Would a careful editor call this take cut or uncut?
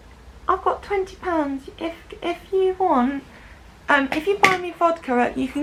uncut